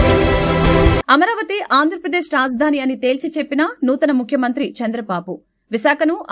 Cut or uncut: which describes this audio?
cut